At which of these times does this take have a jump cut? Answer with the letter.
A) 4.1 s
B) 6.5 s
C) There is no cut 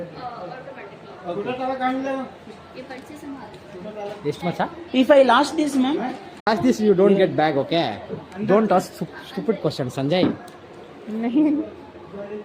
B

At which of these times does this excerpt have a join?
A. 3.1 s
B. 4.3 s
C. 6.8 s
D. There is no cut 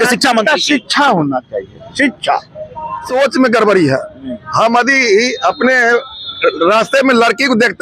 A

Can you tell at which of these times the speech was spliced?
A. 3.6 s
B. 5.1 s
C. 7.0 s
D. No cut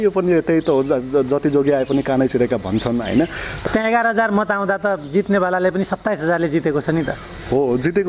A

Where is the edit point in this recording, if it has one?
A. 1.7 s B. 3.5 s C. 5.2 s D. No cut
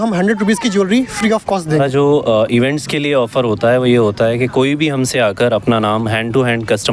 A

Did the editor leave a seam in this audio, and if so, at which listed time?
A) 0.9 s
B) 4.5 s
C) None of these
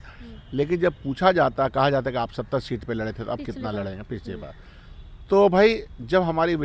C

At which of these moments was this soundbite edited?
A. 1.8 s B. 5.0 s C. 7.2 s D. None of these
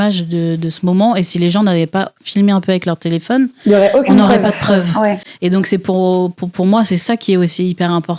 D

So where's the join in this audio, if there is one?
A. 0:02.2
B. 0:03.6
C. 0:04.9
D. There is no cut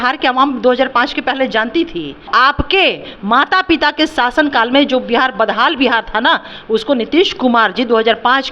A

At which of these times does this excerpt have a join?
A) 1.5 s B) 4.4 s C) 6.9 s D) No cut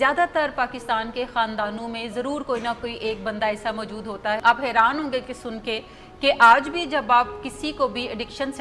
B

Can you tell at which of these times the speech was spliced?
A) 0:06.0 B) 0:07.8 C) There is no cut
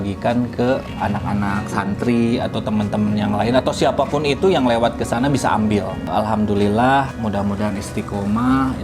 A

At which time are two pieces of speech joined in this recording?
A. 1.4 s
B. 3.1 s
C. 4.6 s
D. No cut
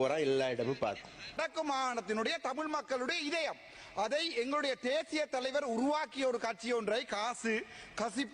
A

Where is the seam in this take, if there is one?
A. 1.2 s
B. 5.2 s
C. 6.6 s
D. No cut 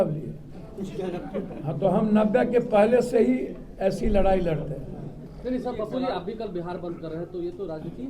B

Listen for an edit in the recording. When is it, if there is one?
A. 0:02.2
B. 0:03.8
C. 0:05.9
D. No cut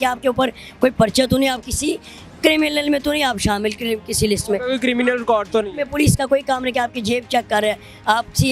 D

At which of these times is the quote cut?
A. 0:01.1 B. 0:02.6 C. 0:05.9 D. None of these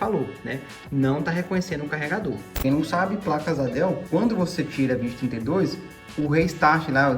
B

